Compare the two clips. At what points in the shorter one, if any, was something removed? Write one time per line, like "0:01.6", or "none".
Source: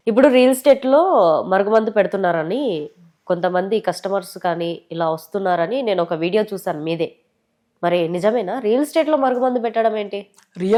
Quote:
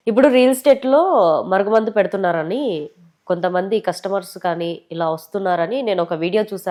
none